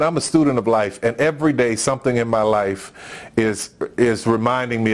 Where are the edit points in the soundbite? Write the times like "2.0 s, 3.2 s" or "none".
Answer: none

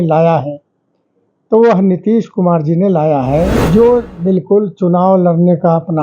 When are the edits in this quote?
3.6 s

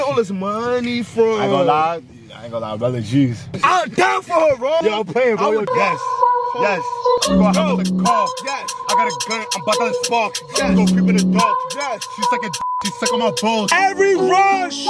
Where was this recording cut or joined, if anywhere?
3.5 s, 4.8 s, 5.6 s, 13.7 s

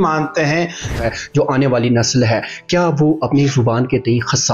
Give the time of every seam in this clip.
1.0 s

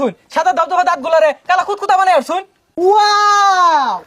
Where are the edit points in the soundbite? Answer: 2.6 s

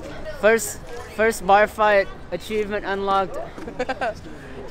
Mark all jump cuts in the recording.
none

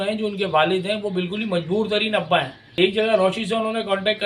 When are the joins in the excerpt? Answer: 2.6 s

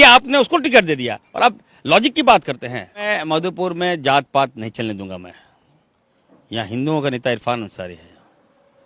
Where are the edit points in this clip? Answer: 3.0 s

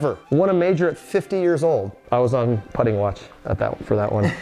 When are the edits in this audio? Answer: none

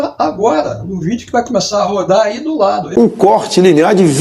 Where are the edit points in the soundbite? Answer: 2.9 s

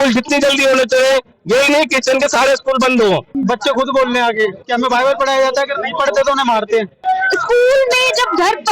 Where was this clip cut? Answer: 3.3 s, 7.0 s

